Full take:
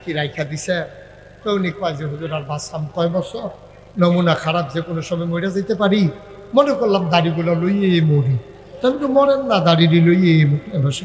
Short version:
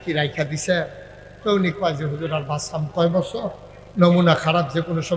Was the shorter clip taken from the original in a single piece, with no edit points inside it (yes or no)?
yes